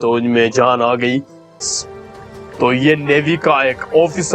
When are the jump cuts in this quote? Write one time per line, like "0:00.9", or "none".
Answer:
0:01.6